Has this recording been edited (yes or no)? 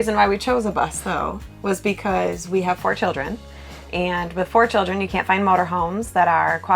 no